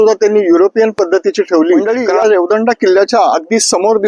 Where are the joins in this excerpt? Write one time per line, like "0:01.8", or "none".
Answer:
0:01.9

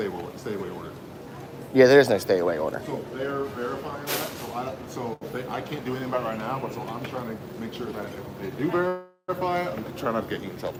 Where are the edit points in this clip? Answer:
none

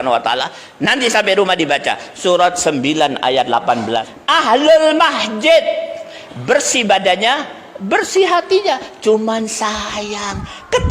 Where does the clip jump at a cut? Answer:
0:04.1

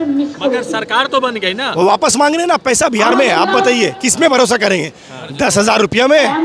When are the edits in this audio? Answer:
none

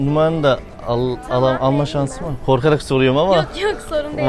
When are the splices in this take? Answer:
none

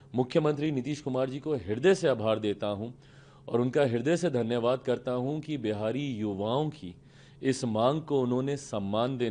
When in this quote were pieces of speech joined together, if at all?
none

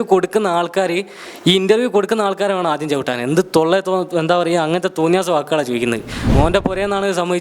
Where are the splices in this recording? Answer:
0:06.3

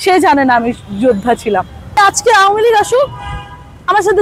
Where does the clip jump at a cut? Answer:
0:02.0

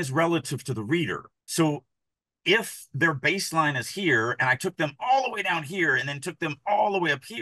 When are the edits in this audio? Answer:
0:01.3

